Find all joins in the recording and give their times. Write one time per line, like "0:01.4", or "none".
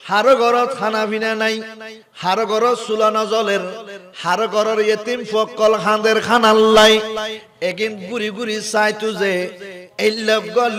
none